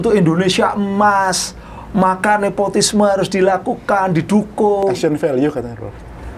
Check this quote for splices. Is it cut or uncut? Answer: uncut